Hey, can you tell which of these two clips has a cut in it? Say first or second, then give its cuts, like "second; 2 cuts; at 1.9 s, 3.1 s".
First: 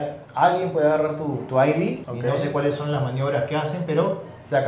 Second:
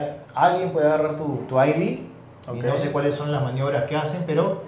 first; 1 cut; at 2.1 s